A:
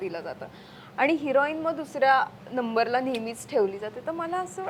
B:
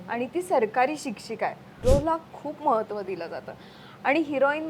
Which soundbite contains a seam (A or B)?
B